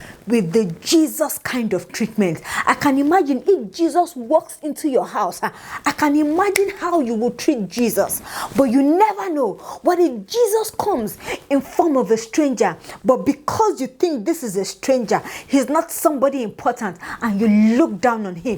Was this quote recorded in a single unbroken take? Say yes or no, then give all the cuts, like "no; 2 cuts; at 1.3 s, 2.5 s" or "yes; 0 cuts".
yes; 0 cuts